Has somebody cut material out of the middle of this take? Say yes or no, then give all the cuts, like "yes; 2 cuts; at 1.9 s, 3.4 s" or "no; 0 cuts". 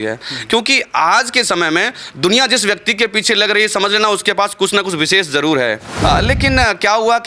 yes; 1 cut; at 5.9 s